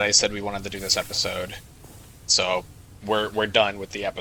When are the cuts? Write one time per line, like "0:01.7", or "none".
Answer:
none

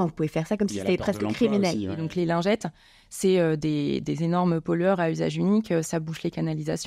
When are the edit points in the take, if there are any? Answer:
0:02.0

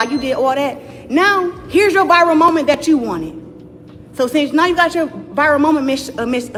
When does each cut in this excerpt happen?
none

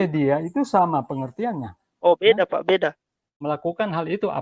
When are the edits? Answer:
0:03.4

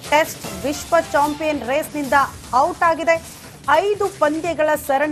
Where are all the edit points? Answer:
none

